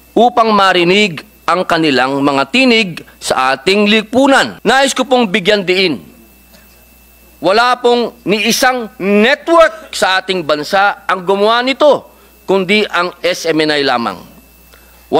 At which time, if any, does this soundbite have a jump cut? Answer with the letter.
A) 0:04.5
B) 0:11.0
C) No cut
A